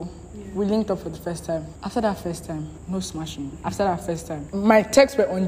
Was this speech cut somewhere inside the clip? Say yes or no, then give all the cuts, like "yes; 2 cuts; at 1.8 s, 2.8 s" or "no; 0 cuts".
yes; 4 cuts; at 1.8 s, 2.8 s, 3.6 s, 4.4 s